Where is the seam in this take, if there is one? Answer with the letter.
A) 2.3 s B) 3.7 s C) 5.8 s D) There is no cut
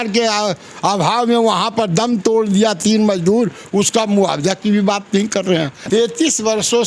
C